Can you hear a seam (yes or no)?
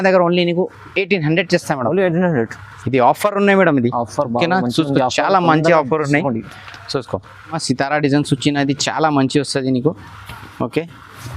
yes